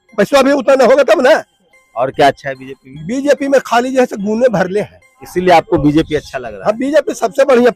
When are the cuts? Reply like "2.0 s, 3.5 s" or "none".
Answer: 1.6 s, 5.2 s

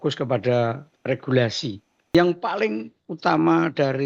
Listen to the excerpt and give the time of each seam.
2.1 s

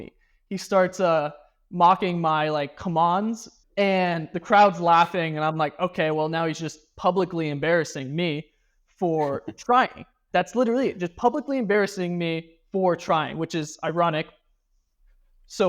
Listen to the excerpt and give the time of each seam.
3.5 s

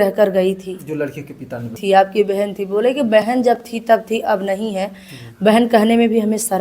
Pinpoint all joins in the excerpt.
1.8 s

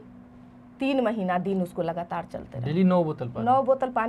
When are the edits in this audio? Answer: none

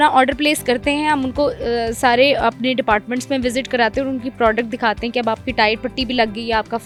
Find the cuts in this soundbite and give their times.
none

